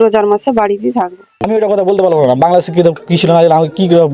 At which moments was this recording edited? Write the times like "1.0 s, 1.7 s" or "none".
1.4 s